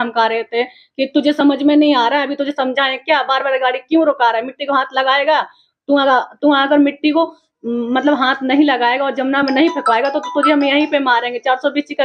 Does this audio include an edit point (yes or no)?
no